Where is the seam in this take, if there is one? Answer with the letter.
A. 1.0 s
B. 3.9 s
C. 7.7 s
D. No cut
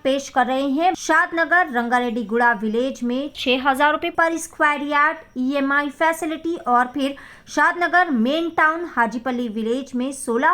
A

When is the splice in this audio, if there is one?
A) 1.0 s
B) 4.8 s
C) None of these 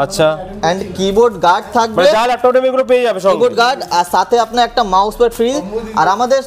C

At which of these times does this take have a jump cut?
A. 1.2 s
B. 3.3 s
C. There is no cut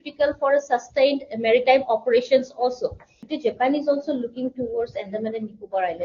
B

